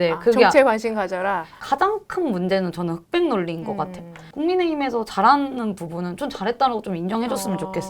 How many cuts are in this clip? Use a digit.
1